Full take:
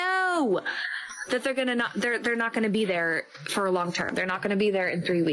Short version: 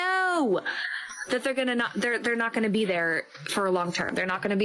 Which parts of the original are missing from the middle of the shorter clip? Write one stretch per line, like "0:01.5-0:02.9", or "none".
none

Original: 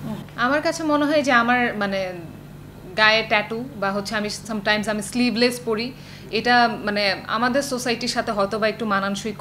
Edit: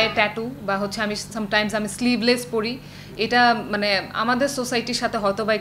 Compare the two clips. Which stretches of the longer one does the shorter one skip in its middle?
none

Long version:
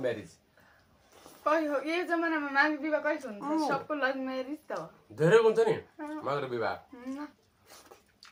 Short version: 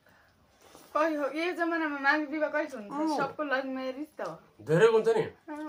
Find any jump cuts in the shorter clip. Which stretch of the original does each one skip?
none

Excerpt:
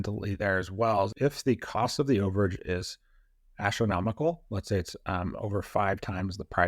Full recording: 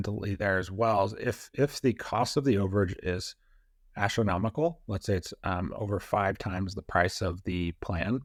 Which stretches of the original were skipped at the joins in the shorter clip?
0:01.1-0:01.5

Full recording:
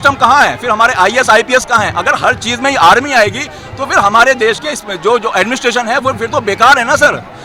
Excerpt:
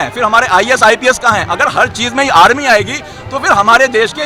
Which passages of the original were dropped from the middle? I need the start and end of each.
none

